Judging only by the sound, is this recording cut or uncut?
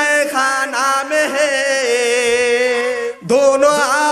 cut